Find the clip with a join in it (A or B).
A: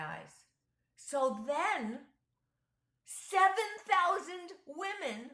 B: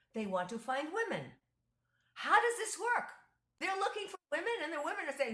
B